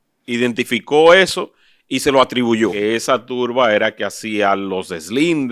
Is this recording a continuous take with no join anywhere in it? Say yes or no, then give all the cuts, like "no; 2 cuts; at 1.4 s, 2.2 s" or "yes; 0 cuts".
no; 1 cut; at 2.7 s